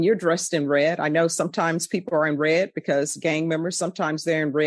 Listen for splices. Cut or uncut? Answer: uncut